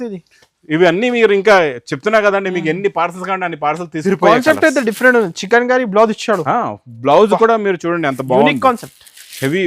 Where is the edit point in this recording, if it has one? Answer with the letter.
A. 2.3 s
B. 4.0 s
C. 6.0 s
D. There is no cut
B